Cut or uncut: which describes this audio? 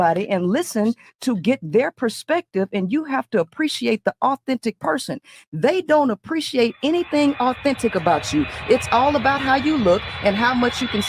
uncut